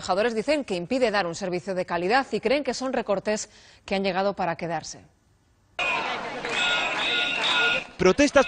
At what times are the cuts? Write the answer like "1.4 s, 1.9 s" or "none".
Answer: 5.0 s